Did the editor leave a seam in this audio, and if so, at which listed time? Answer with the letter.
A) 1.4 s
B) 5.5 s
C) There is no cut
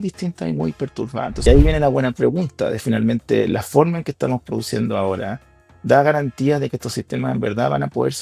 A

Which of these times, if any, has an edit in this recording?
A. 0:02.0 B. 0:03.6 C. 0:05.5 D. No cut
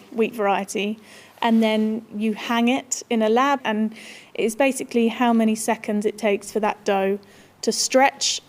B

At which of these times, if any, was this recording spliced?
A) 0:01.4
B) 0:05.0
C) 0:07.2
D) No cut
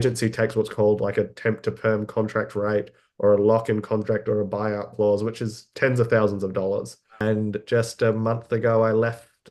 C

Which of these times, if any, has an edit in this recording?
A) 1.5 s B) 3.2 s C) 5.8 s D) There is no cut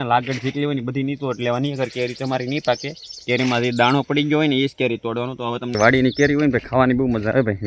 C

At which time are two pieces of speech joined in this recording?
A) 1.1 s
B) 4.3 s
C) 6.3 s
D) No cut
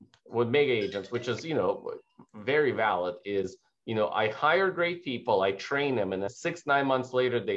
C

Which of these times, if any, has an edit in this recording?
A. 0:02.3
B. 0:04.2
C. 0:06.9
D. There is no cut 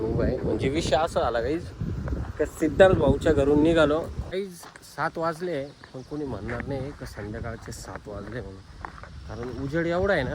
B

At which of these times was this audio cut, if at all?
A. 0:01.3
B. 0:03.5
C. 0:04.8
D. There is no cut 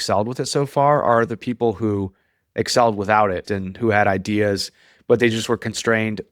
B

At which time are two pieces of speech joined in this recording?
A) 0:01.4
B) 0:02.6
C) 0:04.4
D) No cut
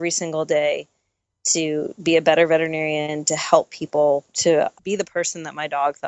C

